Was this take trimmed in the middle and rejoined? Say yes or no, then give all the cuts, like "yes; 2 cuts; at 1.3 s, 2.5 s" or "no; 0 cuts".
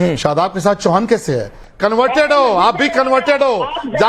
yes; 1 cut; at 1.6 s